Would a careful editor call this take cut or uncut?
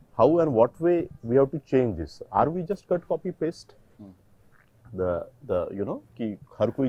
uncut